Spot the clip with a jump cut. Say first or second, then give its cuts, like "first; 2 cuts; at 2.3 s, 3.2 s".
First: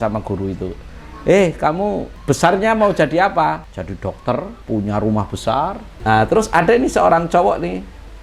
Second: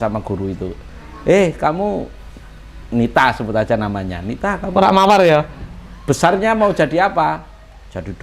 first; 4 cuts; at 2.1 s, 3.7 s, 4.6 s, 5.9 s